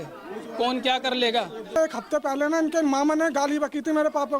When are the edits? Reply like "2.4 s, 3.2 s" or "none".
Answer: 1.7 s